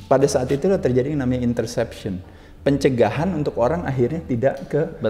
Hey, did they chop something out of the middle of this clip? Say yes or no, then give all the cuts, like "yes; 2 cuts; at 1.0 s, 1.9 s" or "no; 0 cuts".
no; 0 cuts